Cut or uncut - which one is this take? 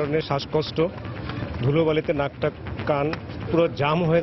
uncut